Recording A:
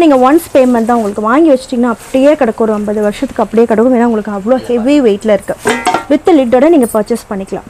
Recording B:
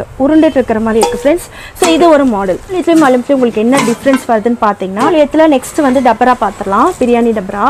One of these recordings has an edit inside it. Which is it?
B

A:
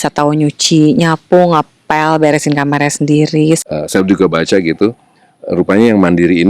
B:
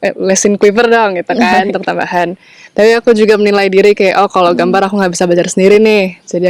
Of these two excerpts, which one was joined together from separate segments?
A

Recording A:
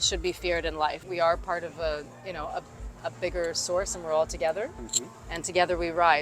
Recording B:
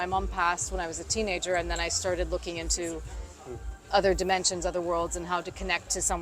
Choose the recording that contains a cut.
A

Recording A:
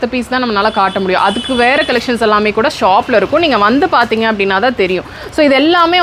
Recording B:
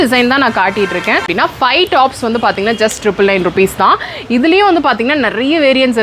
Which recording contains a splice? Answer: B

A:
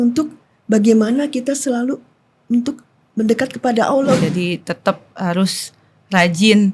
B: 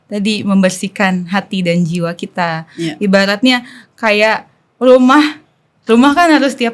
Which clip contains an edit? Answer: A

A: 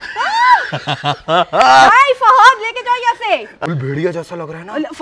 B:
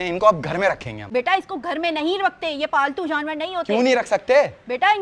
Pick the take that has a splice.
A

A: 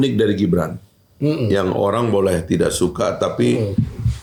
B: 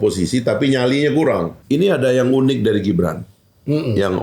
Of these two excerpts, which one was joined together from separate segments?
B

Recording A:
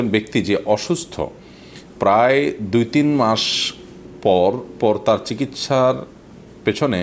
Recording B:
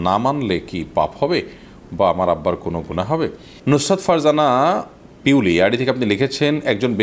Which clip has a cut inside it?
B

